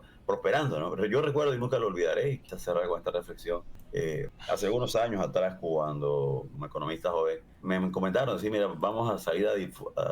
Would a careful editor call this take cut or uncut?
cut